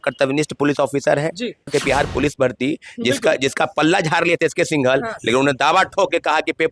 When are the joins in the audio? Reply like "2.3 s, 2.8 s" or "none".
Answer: 1.7 s

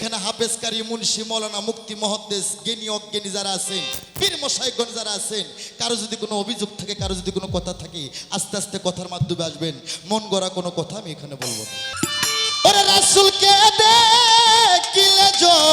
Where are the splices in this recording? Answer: 11.9 s

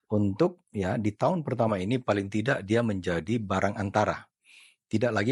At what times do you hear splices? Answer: none

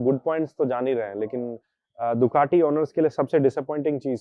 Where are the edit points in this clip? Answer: none

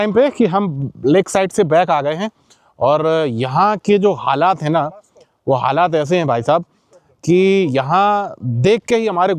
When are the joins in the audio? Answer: none

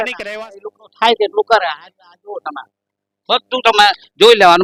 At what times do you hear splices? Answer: none

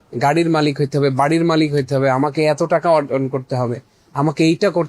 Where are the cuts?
none

